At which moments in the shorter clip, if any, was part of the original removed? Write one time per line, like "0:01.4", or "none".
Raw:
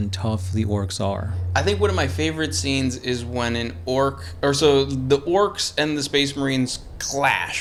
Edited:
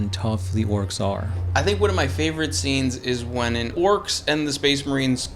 0:03.7

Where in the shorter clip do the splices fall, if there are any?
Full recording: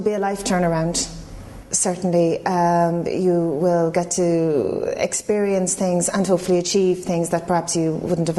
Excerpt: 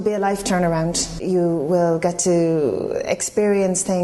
0:01.2

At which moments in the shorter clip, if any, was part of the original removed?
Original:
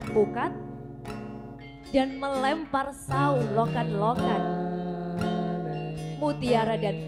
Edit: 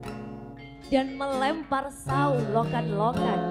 none

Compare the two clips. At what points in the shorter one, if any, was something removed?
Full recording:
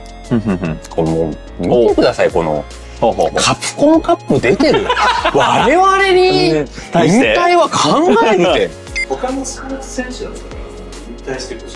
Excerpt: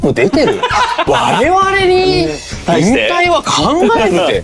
none

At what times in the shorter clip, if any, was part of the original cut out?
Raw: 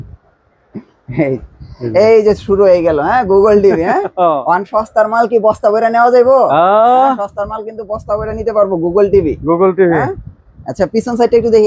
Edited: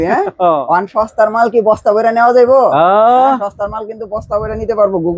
none

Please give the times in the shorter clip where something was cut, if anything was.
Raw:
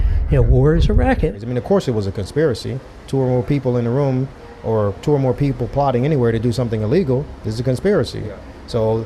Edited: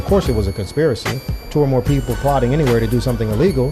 0:01.4

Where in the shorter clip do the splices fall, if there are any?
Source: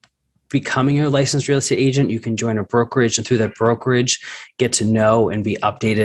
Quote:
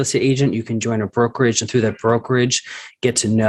none

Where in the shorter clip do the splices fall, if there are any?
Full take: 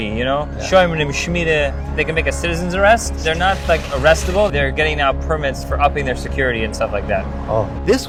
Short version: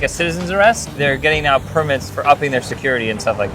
0:01.0

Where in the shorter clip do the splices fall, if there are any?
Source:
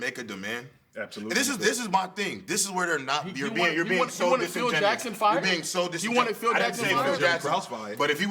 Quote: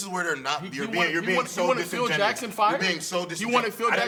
none

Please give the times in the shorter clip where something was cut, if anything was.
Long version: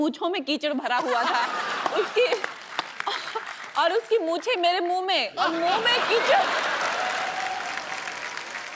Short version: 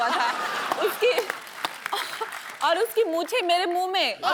none

